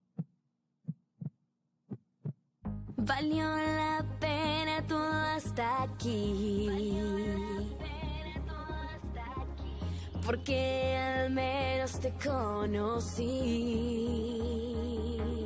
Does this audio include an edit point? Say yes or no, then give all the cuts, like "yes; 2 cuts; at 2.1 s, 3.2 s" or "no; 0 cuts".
yes; 1 cut; at 2.3 s